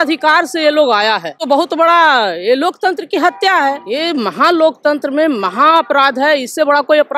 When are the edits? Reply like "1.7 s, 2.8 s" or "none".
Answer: 1.4 s, 3.8 s